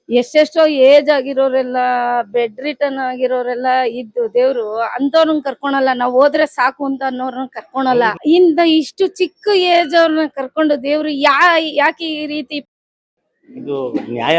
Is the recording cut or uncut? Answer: cut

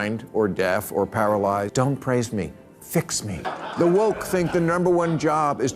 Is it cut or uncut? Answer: cut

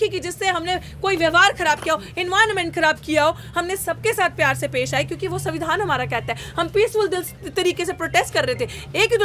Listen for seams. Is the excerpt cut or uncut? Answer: uncut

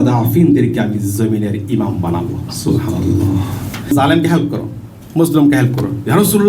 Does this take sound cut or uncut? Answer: cut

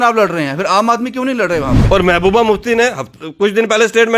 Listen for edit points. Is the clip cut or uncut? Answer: cut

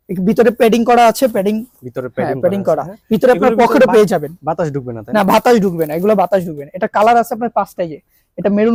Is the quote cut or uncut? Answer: uncut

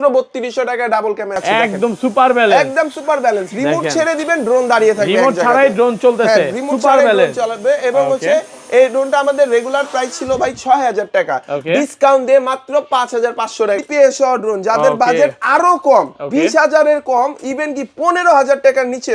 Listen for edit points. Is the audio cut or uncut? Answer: cut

